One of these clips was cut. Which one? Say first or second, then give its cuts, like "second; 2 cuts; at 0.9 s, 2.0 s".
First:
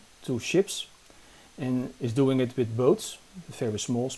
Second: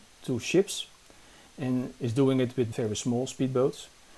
second; 1 cut; at 2.7 s